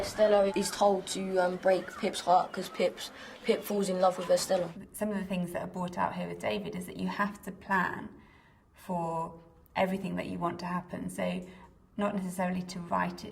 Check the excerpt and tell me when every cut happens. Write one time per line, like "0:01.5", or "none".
none